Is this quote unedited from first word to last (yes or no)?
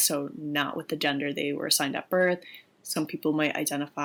yes